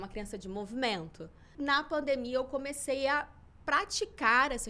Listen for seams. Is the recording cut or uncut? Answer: cut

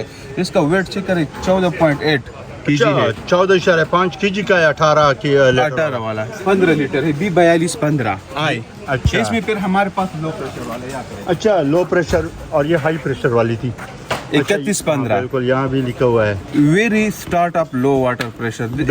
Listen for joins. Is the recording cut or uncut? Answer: cut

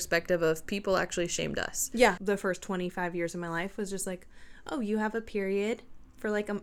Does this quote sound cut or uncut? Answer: cut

